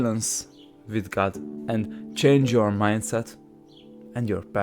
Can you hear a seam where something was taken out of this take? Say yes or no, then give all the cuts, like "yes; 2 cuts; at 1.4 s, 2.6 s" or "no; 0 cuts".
yes; 1 cut; at 1.5 s